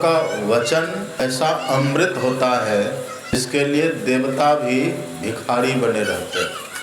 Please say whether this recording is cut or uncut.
cut